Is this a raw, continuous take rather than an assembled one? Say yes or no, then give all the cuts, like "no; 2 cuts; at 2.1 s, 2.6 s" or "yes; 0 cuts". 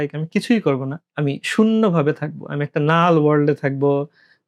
yes; 0 cuts